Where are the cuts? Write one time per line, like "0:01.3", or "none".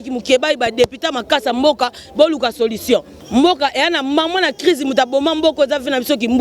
0:03.2